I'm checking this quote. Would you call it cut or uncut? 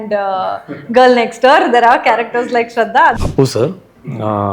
cut